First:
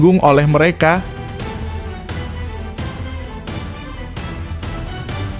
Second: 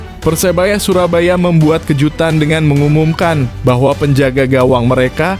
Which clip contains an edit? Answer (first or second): first